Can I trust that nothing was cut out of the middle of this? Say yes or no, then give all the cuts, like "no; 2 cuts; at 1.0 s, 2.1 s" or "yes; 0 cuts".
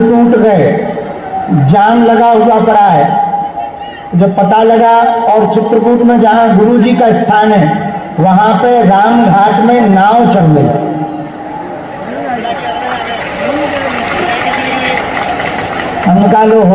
yes; 0 cuts